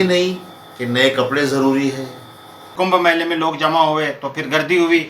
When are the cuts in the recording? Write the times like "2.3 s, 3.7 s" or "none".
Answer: 2.7 s